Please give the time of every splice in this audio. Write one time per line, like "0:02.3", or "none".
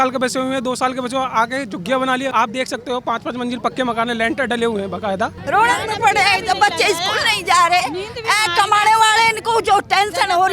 0:02.3
0:05.4